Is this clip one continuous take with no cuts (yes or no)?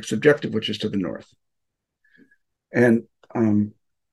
yes